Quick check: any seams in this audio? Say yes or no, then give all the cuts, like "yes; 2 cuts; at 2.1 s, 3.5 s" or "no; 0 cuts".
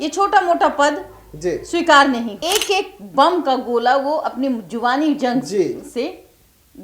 yes; 1 cut; at 2.4 s